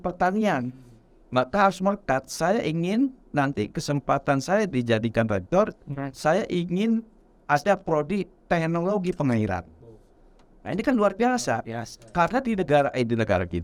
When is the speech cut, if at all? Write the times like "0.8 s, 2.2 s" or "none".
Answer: none